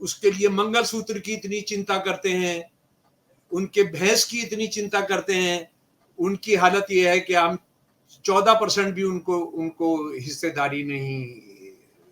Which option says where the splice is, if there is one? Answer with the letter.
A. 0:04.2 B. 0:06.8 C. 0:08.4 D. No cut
D